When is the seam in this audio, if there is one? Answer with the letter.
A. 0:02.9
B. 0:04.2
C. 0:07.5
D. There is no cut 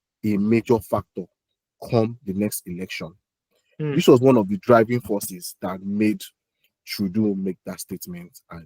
D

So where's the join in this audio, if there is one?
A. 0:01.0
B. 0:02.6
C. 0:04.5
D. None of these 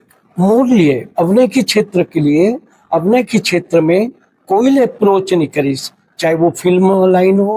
D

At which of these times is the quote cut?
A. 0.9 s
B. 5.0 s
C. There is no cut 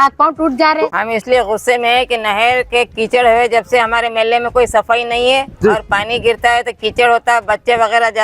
A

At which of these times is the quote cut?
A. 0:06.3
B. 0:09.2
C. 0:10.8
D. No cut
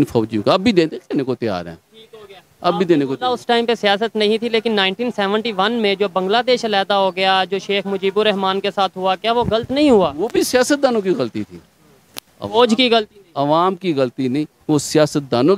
D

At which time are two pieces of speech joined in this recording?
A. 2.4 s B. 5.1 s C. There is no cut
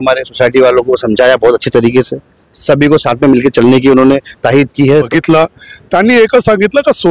B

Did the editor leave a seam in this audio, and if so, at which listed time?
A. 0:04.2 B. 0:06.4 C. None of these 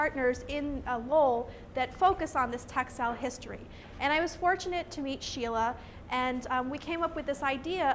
B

